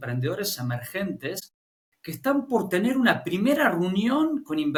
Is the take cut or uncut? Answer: uncut